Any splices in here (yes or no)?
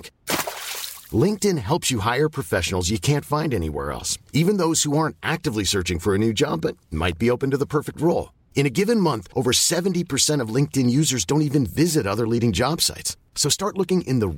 no